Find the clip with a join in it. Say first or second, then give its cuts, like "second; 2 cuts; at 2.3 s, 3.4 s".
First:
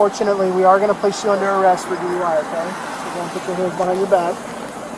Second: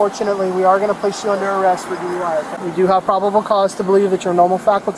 second; 1 cut; at 2.5 s